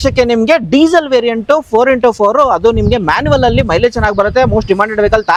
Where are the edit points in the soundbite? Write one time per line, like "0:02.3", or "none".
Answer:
none